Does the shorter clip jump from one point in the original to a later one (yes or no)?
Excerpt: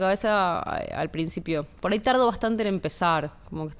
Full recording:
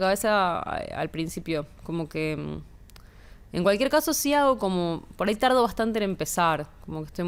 yes